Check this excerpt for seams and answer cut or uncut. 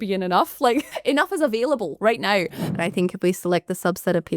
cut